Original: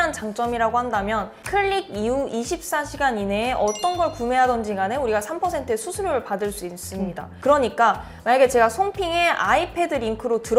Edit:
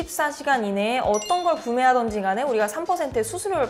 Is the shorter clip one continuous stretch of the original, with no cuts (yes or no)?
yes